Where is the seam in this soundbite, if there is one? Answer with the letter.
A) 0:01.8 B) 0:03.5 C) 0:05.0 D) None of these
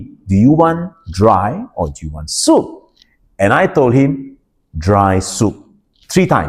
D